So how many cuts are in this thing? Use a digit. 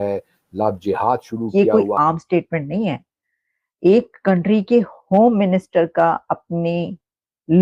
1